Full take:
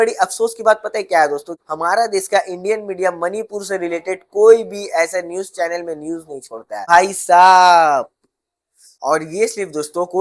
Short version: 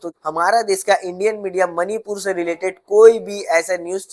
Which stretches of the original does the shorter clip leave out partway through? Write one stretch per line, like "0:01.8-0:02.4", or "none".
none